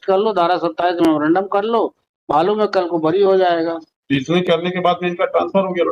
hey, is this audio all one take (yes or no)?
yes